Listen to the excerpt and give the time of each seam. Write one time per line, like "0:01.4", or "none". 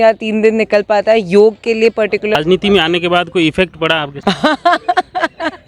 0:02.3
0:04.1